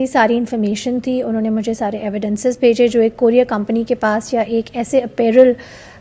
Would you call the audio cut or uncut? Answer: uncut